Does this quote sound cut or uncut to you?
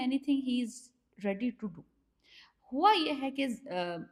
uncut